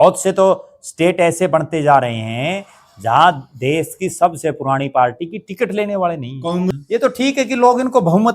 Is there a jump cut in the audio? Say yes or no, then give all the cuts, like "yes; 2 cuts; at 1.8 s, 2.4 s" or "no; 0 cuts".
yes; 1 cut; at 6.7 s